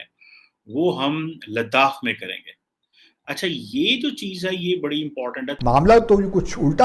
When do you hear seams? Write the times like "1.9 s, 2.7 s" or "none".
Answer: 5.6 s

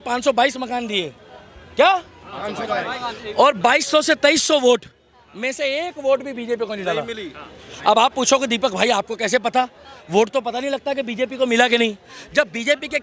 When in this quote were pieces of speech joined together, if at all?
none

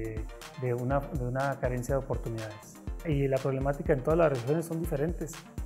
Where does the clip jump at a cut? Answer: 3.0 s

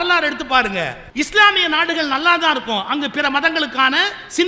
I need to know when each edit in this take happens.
1.0 s

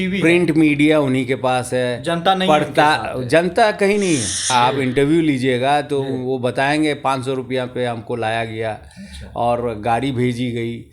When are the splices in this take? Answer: 4.5 s

